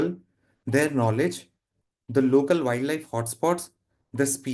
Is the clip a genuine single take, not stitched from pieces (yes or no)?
yes